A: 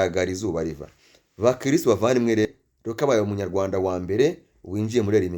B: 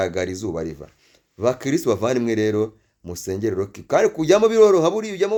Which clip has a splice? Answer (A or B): A